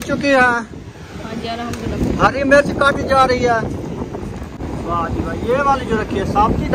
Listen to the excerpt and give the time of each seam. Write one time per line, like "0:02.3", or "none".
none